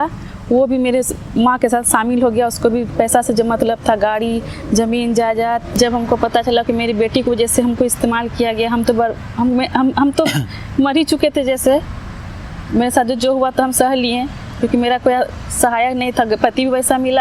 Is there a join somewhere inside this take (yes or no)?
yes